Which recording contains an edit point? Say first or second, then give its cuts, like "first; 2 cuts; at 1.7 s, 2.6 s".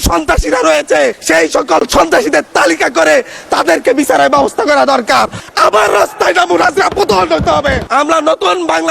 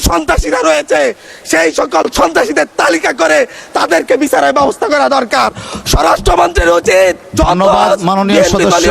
first; 3 cuts; at 1.2 s, 5.4 s, 7.8 s